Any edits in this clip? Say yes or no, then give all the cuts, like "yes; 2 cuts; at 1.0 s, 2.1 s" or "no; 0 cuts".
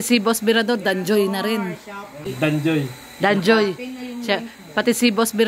no; 0 cuts